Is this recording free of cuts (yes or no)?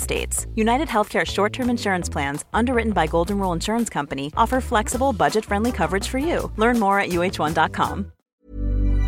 no